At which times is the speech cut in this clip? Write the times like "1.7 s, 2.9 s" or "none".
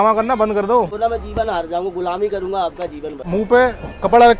0.9 s, 3.2 s